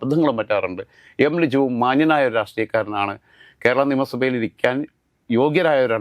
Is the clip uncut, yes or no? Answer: yes